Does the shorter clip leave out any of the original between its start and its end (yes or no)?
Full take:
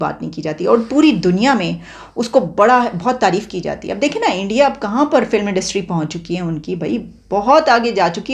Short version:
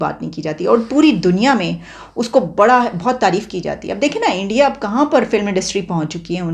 no